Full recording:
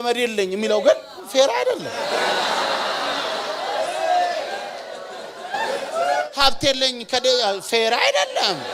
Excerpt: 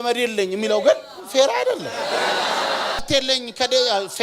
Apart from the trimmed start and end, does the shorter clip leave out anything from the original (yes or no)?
yes